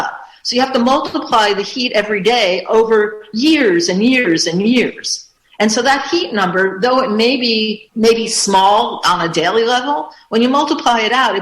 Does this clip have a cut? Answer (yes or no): yes